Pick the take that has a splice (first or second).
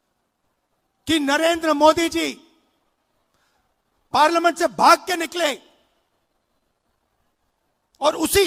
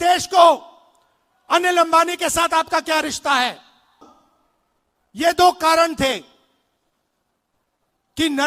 second